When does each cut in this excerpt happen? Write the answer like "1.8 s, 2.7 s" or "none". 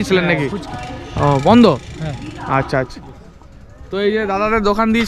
none